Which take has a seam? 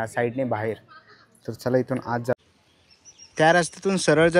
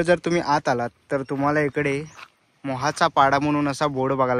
first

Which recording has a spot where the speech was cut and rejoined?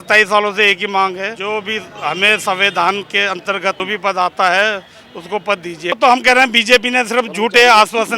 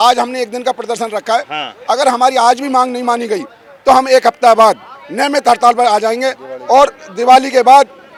first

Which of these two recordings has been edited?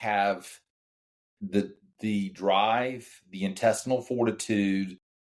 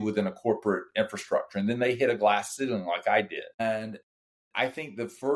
second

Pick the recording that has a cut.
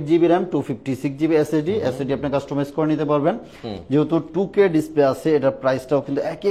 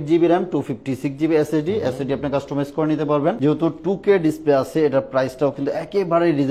second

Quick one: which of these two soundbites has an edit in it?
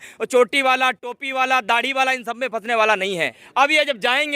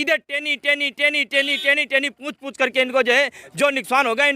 first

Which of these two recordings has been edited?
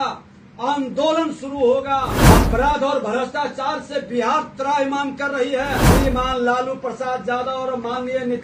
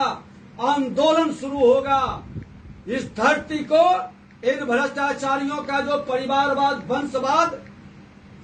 first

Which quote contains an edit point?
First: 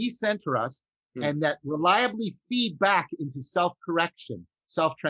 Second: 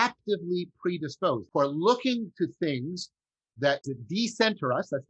second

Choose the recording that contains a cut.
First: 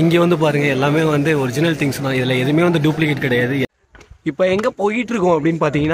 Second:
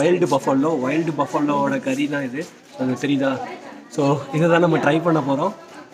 first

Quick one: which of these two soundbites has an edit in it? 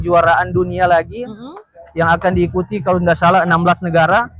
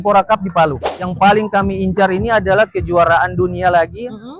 second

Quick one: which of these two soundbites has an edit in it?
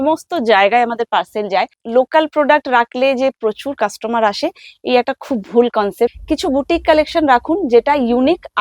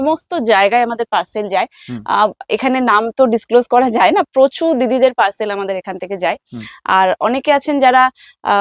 first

